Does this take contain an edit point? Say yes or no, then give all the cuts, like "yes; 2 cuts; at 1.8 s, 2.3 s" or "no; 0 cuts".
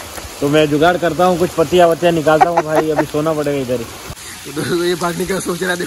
yes; 1 cut; at 4.0 s